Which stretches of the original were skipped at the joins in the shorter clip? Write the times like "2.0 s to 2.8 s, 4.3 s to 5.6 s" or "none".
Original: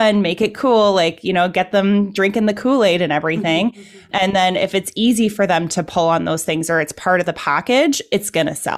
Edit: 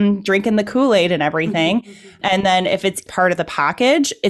4.9 s to 6.9 s